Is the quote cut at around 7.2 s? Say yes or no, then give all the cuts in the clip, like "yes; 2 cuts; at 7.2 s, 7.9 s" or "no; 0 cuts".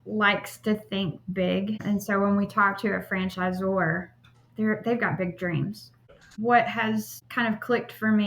yes; 3 cuts; at 1.8 s, 6.0 s, 7.2 s